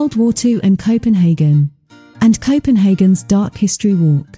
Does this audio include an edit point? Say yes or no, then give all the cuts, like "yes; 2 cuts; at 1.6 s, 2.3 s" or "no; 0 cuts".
no; 0 cuts